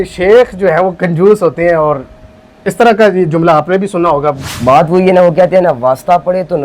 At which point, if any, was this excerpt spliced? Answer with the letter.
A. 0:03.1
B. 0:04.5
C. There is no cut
B